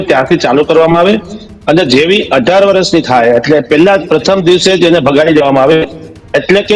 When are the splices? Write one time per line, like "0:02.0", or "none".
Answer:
none